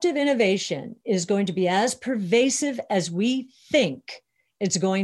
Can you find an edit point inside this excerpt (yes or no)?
no